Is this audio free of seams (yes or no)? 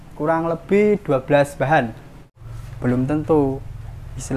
no